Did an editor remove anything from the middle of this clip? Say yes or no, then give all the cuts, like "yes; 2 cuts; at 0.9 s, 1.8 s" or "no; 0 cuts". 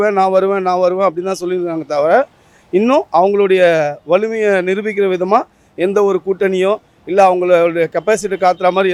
no; 0 cuts